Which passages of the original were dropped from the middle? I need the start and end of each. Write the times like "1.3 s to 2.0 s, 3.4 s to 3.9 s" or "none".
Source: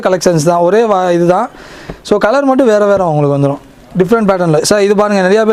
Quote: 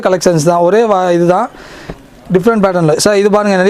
2.0 s to 3.6 s